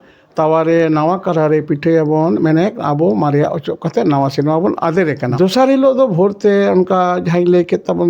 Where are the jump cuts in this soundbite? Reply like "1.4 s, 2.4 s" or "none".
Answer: 5.3 s